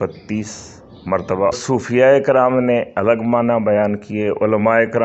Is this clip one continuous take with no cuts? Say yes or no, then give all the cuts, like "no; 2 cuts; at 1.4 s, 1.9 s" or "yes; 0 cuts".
no; 1 cut; at 1.5 s